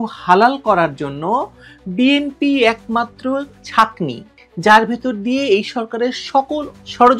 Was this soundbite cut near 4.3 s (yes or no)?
yes